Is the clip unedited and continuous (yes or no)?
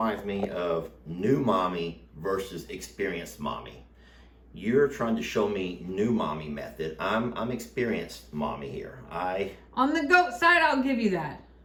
yes